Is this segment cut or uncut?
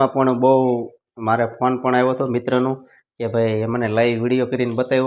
uncut